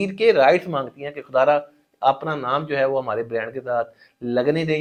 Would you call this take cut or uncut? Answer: uncut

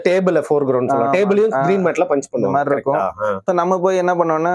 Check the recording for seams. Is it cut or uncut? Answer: cut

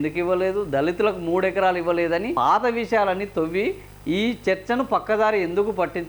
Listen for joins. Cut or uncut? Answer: cut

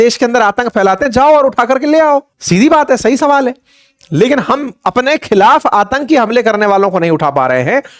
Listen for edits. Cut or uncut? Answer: cut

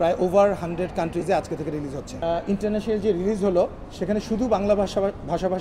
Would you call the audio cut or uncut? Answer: cut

